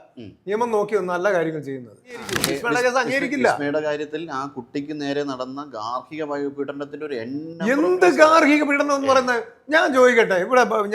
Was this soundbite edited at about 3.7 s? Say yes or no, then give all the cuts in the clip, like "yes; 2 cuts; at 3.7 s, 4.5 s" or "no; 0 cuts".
no; 1 cut; at 2.4 s